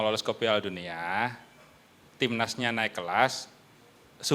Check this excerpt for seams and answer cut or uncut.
uncut